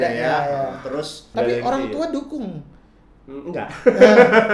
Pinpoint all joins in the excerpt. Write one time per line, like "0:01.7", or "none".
0:01.3